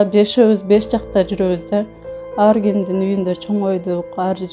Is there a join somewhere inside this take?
no; 0 cuts

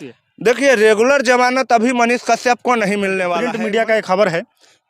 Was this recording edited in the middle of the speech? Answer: yes; 1 cut; at 3.4 s

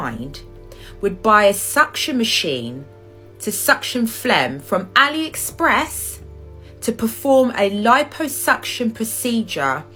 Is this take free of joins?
yes; 0 cuts

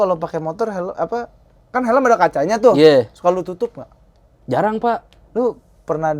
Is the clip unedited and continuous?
no; 1 cut; at 5.1 s

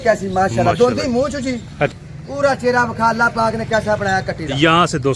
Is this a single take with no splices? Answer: no; 1 cut; at 1.9 s

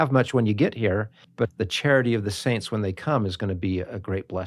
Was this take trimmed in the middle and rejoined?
yes; 1 cut; at 1.5 s

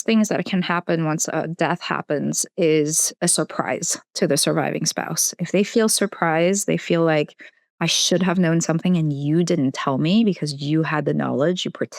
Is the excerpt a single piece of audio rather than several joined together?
no; 1 cut; at 3.1 s

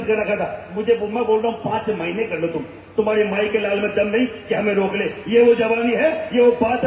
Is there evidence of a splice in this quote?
no; 0 cuts

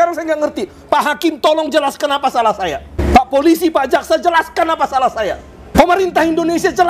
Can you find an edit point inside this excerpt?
yes; 1 cut; at 5.7 s

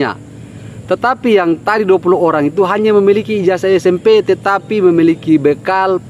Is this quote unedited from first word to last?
yes; 0 cuts

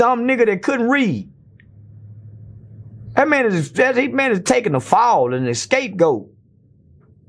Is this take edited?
no; 0 cuts

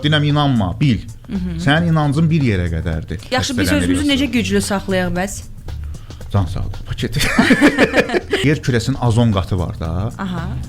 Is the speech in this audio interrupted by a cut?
yes; 2 cuts; at 3.2 s, 8.4 s

